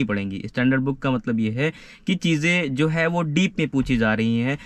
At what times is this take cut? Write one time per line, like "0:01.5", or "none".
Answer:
none